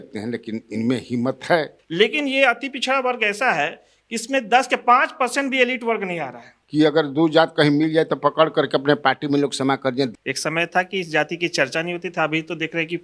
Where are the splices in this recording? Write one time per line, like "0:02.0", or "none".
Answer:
0:01.8
0:06.5
0:10.1